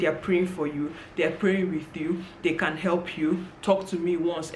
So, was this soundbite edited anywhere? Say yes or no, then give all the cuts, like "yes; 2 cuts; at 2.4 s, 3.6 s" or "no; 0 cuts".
no; 0 cuts